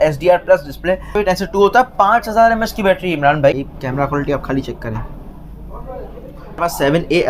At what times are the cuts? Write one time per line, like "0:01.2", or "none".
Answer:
0:01.1
0:03.5
0:06.6